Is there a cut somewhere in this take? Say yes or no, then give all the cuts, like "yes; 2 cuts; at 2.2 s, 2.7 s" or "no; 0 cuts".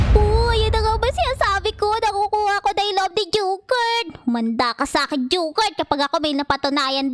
no; 0 cuts